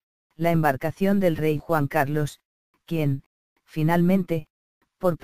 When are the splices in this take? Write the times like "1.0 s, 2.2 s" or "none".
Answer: 1.1 s